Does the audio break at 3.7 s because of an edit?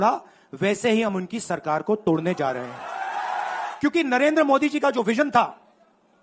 yes; 1 cut; at 3.7 s

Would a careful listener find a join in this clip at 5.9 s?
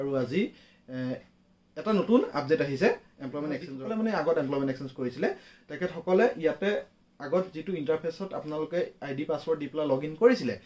no; 1 cut; at 3.7 s

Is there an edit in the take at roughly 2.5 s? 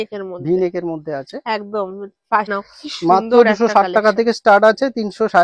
yes; 1 cut; at 2.5 s

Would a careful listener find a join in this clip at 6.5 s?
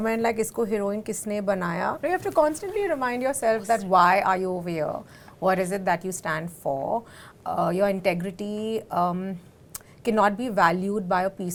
no; 0 cuts

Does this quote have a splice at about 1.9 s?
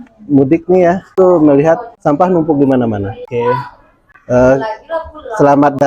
yes; 3 cuts; at 1.1 s, 1.9 s, 3.2 s

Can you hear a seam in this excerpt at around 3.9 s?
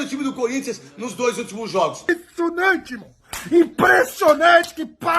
no; 1 cut; at 2.1 s

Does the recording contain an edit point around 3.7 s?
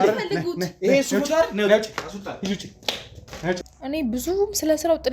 yes; 1 cut; at 3.7 s

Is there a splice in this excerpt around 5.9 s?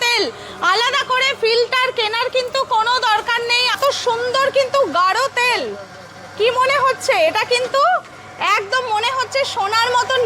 no; 1 cut; at 3.7 s

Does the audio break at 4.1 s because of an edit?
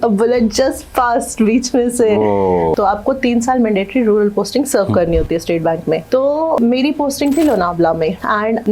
no; 1 cut; at 2.7 s

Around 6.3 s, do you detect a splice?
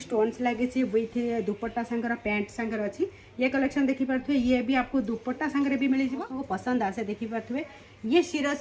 yes; 1 cut; at 6.3 s

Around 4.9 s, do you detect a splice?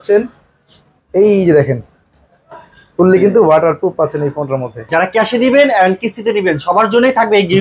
yes; 1 cut; at 4.9 s

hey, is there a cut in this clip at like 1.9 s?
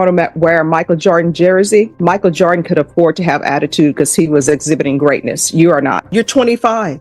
yes; 2 cuts; at 1.9 s, 6.1 s

